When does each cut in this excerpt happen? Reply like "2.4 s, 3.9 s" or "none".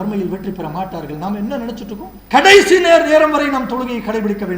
2.1 s